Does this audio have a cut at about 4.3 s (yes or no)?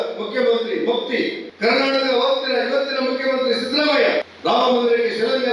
yes